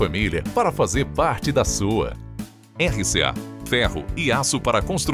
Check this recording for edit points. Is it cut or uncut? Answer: uncut